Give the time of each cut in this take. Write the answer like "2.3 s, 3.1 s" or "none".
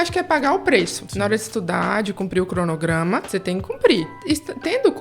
1.0 s, 3.3 s, 4.2 s